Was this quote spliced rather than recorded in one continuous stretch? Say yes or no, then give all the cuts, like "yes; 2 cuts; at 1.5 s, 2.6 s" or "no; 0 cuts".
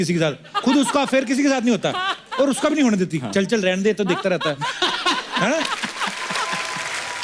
no; 0 cuts